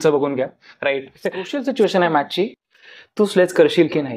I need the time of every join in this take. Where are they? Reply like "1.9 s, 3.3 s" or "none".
1.5 s